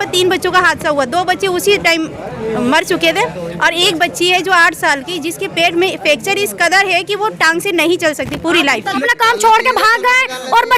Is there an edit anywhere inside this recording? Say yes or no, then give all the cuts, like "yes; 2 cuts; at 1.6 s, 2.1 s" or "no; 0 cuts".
yes; 1 cut; at 9.0 s